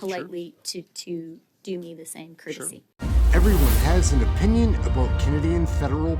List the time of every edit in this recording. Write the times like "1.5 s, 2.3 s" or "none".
2.9 s